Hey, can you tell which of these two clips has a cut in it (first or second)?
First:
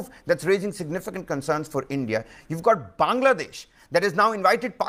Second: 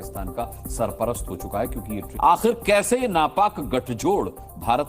second